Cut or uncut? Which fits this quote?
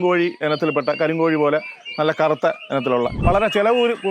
cut